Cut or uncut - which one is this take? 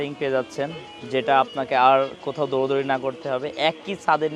uncut